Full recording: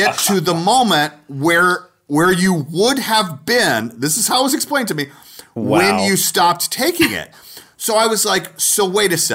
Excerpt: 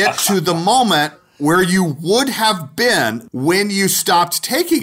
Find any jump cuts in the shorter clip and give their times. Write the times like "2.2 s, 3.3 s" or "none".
1.2 s, 3.2 s